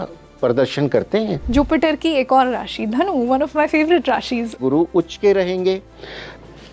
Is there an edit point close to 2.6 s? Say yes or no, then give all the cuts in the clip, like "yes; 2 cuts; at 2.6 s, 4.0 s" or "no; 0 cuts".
no; 2 cuts; at 1.4 s, 4.5 s